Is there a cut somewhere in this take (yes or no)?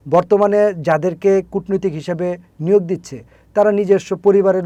no